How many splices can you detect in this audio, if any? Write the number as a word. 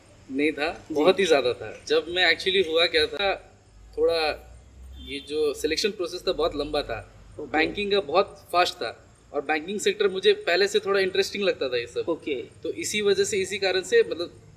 one